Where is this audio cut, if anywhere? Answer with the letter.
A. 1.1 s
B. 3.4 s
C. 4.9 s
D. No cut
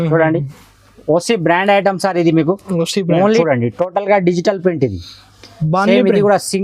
B